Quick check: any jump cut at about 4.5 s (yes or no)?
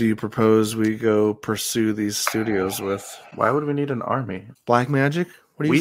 yes